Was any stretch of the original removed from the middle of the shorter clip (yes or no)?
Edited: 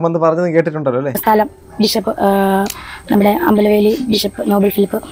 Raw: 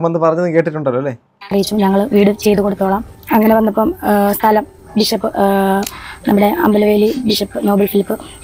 yes